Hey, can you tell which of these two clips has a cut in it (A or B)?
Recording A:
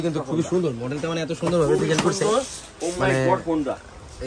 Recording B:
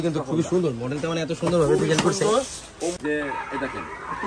B